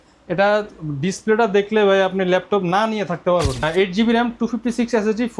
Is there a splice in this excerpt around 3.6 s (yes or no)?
yes